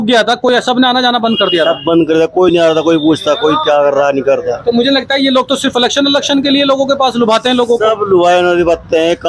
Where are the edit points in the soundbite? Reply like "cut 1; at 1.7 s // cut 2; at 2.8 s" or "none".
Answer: none